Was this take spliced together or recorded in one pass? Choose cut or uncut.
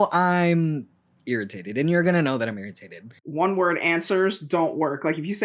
cut